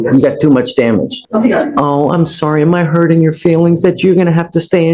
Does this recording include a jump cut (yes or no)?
yes